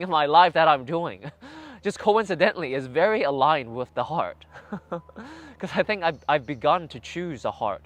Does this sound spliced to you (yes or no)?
no